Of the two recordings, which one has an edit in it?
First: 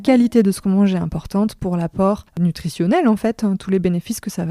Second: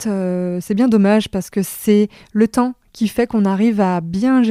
first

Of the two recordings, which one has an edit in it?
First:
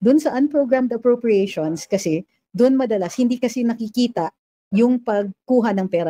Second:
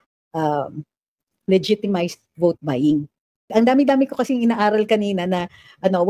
second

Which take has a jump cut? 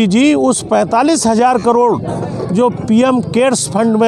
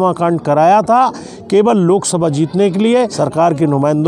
second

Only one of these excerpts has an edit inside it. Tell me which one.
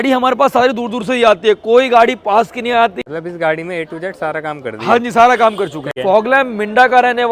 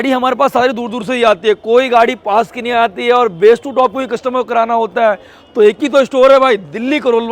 first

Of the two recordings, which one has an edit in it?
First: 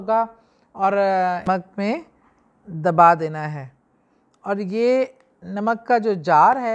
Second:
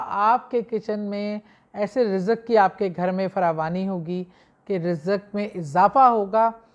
first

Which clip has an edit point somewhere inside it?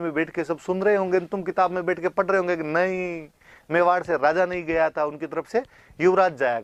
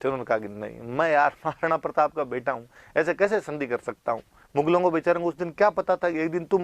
second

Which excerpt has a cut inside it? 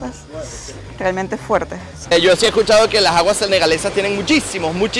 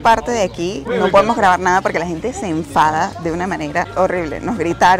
first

